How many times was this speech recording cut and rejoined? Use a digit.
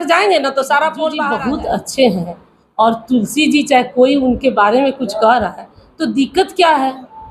1